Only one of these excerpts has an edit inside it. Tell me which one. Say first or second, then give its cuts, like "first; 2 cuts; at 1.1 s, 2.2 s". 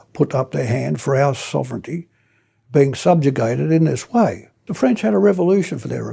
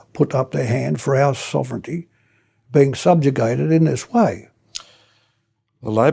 first; 1 cut; at 4.6 s